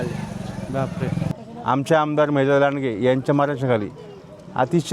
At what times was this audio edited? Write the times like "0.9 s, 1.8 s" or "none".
1.3 s